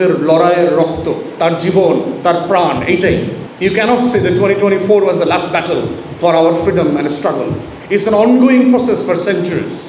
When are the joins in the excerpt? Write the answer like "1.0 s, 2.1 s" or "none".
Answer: 3.4 s